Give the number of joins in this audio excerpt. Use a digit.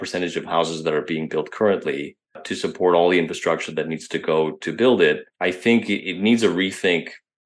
2